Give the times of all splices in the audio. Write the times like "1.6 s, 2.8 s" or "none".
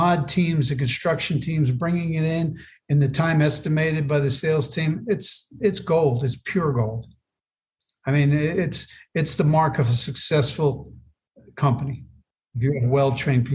12.5 s